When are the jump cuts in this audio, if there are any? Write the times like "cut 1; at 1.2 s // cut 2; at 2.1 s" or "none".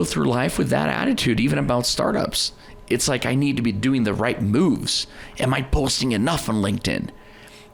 none